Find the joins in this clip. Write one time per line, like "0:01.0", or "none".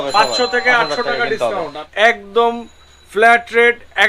0:01.8